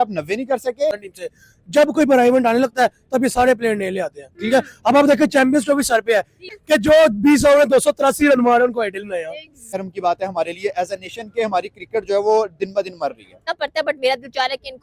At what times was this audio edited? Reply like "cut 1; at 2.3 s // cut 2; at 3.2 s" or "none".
cut 1; at 1.1 s // cut 2; at 6.5 s // cut 3; at 9.7 s // cut 4; at 13.4 s